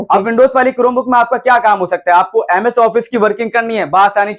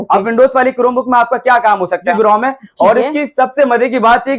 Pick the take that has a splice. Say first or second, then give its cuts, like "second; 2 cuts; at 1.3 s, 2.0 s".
second; 1 cut; at 2.1 s